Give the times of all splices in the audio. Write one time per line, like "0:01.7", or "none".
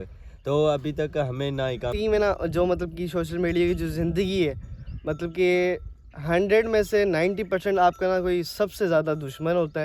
0:02.0